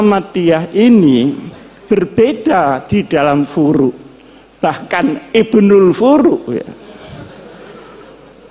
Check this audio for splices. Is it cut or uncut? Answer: uncut